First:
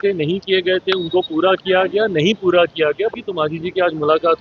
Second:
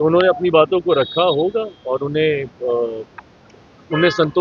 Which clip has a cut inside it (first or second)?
first